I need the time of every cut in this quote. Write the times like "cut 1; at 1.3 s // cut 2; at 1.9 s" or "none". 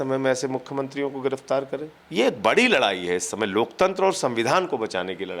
cut 1; at 2.0 s

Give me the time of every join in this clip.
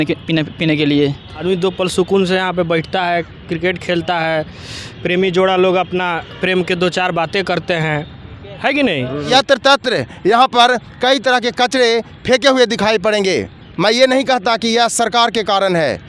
cut 1; at 1.3 s // cut 2; at 9.3 s

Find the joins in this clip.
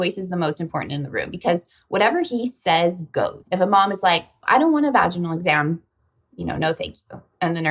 cut 1; at 3.4 s // cut 2; at 4.3 s

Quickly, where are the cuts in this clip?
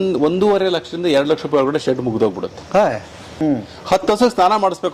cut 1; at 3.3 s

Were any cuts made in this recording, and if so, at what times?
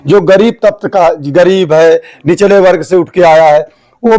none

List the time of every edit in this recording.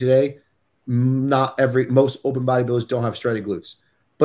none

